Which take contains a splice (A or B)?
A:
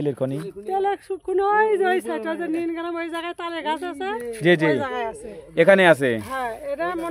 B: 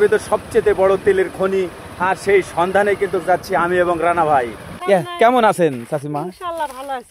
B